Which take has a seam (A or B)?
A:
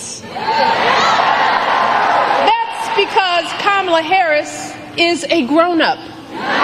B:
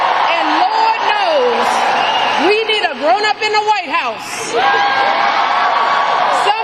A